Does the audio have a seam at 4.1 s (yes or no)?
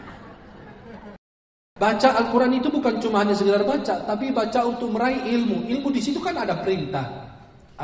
no